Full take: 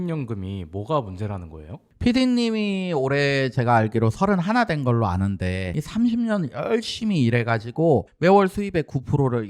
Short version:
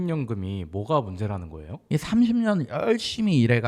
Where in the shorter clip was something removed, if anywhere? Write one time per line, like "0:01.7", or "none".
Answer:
0:01.8

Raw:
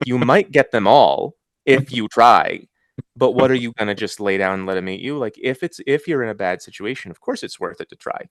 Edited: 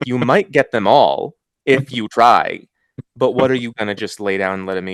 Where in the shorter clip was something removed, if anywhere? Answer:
none

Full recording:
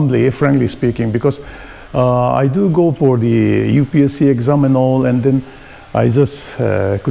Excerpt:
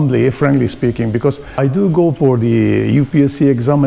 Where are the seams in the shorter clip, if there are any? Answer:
0:01.6

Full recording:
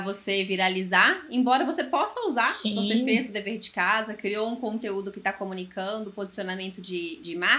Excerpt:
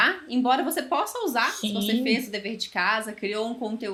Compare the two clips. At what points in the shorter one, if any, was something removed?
none

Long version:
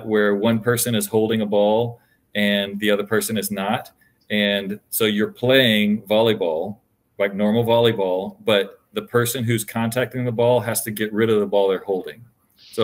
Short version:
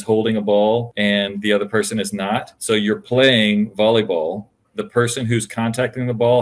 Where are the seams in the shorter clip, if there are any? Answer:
0:00.9
0:02.5
0:04.7

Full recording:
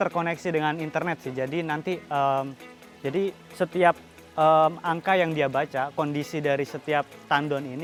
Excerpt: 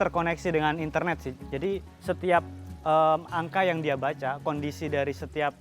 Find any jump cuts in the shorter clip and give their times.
0:01.3

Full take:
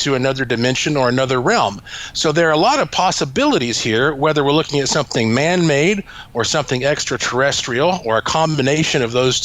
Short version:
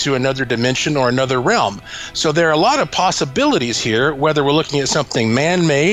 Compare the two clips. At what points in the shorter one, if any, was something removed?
none

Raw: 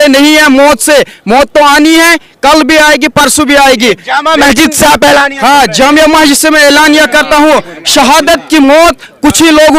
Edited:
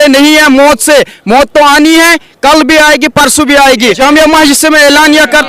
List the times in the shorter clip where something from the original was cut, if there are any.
0:04.0

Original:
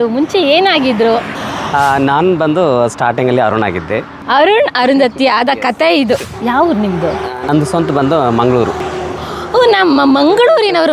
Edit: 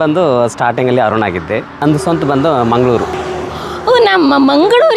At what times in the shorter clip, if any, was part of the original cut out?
0:01.7

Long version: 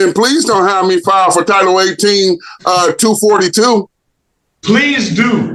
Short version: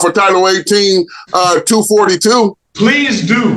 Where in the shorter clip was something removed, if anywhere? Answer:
0:02.6

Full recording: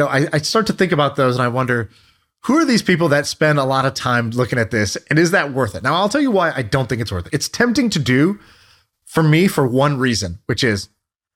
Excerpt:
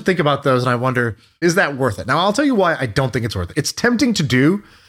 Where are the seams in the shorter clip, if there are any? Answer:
0:01.4

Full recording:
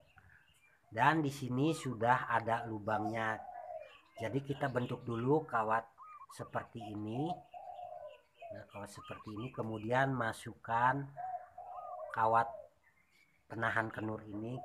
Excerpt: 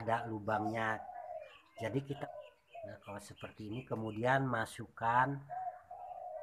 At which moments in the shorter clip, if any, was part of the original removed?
0:02.2

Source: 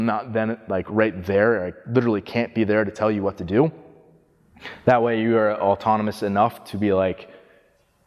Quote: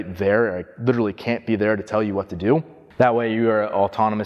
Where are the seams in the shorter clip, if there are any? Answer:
0:02.8

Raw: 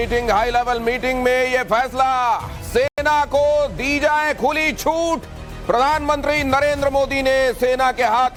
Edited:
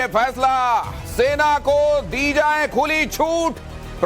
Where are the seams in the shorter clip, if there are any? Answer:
0:01.3

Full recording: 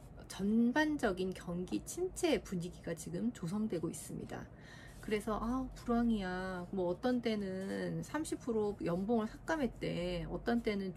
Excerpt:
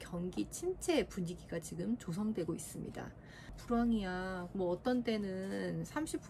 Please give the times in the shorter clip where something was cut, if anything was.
0:03.6

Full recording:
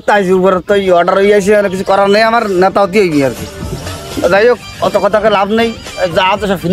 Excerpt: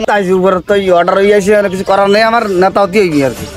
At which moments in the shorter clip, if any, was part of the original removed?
none

